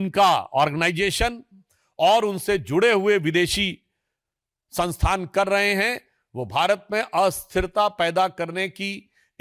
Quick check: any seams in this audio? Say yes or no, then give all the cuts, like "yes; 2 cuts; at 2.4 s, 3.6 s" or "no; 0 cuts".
no; 0 cuts